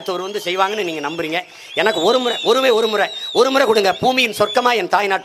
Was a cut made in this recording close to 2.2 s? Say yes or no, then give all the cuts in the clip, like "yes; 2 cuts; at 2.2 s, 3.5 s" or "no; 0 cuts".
no; 0 cuts